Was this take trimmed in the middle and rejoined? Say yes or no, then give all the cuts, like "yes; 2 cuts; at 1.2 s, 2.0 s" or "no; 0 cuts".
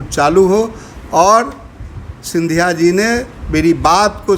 no; 0 cuts